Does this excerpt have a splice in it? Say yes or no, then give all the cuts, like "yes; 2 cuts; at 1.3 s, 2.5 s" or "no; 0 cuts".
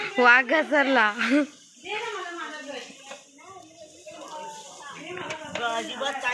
no; 0 cuts